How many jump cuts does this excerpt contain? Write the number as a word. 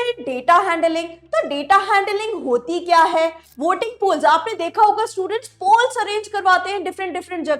one